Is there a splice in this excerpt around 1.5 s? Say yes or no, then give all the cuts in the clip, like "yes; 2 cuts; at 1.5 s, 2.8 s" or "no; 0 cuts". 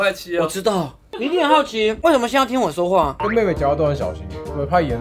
no; 1 cut; at 3.2 s